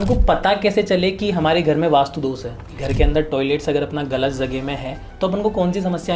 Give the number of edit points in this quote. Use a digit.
1